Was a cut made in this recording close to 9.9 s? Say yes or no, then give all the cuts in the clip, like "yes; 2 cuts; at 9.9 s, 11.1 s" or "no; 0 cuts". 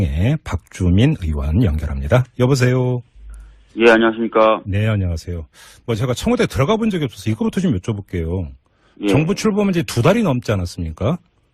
yes; 1 cut; at 9.9 s